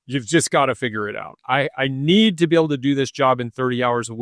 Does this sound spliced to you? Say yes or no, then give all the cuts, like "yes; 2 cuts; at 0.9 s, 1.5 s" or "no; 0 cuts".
yes; 1 cut; at 1.3 s